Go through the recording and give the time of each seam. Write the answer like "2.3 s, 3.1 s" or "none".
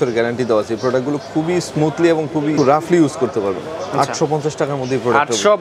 none